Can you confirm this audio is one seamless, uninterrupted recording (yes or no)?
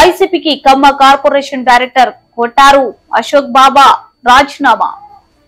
yes